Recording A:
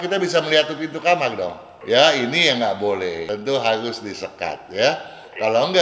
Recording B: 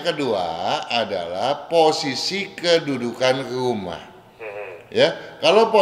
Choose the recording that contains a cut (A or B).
A